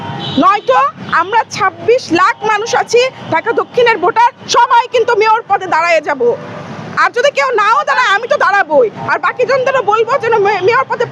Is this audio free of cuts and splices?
yes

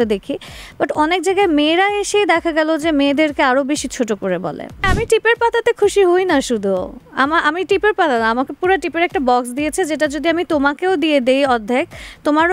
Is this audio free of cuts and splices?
no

